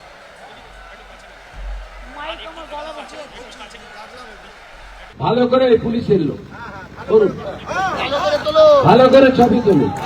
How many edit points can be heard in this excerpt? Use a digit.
1